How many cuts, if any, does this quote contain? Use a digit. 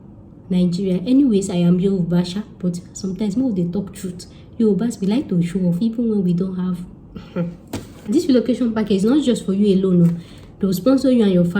1